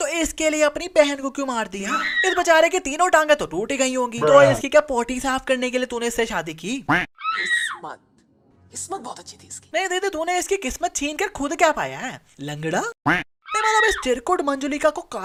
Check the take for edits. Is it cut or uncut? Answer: uncut